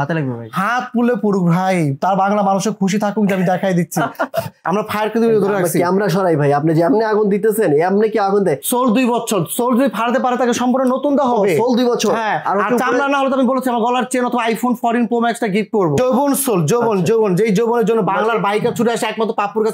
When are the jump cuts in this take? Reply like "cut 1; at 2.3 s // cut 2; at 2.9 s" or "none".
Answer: cut 1; at 4.6 s // cut 2; at 8.6 s // cut 3; at 16.0 s

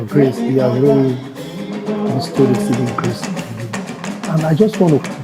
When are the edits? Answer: none

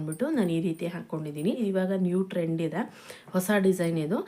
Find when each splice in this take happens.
cut 1; at 1.6 s

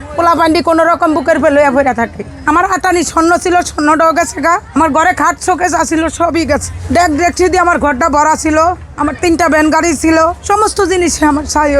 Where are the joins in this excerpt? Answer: cut 1; at 2.3 s // cut 2; at 4.7 s // cut 3; at 6.7 s // cut 4; at 8.9 s // cut 5; at 10.4 s

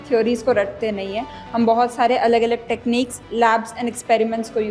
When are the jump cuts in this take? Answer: none

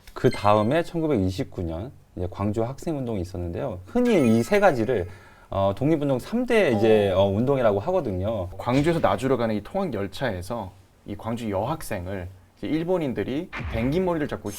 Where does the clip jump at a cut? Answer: cut 1; at 8.6 s

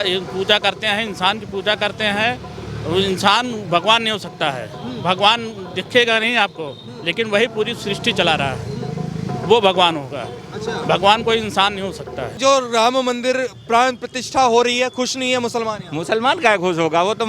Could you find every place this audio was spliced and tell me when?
cut 1; at 12.4 s

